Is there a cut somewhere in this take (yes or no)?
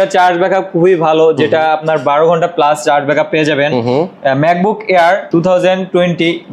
no